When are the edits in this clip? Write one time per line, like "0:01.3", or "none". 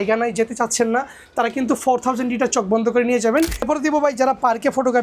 0:03.7